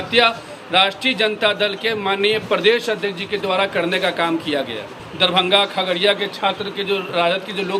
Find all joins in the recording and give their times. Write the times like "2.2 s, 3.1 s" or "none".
5.0 s